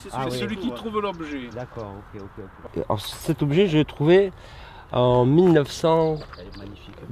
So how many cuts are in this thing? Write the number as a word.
one